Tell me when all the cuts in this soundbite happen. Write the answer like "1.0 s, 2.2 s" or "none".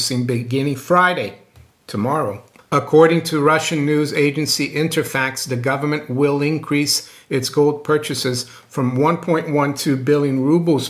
2.5 s